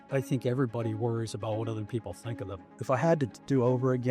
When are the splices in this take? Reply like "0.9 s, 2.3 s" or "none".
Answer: 2.7 s